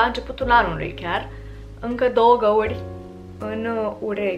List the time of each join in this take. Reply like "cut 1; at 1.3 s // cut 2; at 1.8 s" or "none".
none